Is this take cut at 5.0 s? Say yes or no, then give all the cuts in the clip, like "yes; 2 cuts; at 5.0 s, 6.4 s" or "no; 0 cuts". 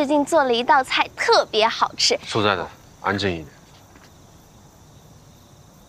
yes; 1 cut; at 5.0 s